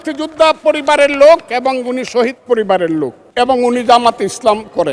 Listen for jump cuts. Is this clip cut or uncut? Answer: cut